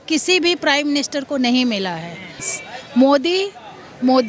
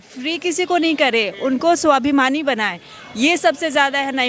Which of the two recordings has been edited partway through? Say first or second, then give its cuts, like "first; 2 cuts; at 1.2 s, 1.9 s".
first; 1 cut; at 2.4 s